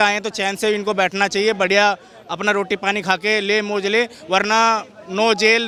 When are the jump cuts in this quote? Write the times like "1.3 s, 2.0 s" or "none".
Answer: none